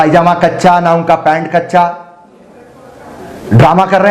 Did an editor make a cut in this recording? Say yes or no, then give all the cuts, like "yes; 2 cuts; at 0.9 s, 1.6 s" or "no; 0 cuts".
no; 0 cuts